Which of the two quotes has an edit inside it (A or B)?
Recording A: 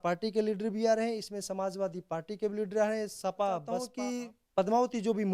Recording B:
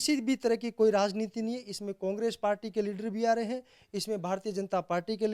A